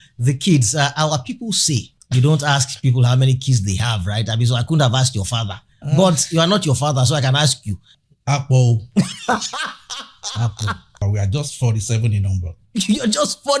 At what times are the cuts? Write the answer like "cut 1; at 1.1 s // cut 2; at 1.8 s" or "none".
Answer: cut 1; at 1.9 s // cut 2; at 7.9 s // cut 3; at 11.0 s